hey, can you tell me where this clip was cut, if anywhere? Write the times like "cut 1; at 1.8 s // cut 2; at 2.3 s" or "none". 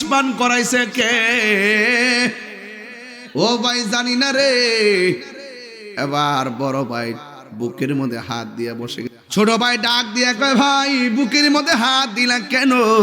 cut 1; at 9.2 s